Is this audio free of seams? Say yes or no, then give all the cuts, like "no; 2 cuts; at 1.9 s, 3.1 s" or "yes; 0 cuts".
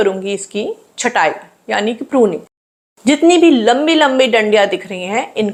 yes; 0 cuts